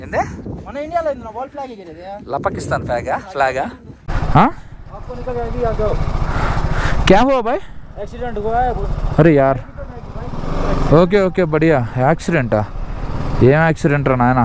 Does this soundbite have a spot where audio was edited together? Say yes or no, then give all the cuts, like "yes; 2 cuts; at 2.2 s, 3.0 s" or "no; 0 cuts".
yes; 1 cut; at 4.1 s